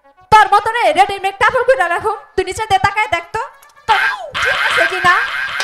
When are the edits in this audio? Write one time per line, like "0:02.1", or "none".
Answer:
none